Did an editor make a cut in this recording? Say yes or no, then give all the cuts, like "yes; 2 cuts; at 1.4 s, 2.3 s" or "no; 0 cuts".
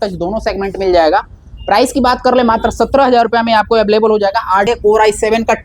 yes; 1 cut; at 4.7 s